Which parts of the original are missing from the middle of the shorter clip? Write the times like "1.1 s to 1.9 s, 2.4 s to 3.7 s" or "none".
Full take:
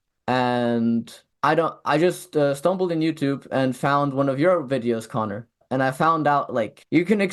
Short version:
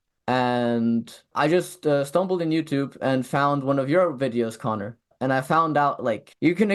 1.3 s to 1.8 s